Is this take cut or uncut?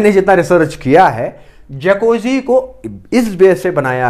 uncut